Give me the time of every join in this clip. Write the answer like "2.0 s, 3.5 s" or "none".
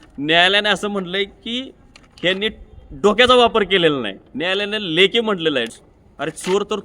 5.7 s